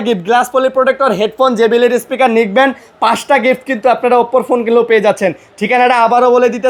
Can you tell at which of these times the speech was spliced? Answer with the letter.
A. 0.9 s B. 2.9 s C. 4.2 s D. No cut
D